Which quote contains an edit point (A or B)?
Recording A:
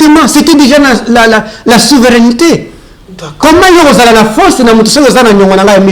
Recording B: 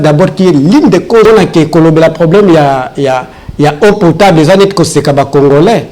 B